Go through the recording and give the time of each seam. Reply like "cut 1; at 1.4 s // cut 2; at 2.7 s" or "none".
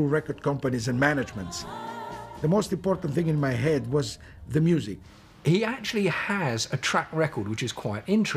cut 1; at 3.2 s